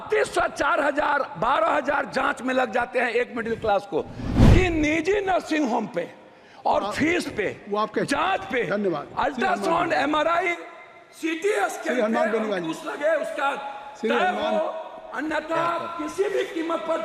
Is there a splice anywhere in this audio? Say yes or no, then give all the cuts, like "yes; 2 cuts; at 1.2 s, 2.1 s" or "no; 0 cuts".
yes; 1 cut; at 4.3 s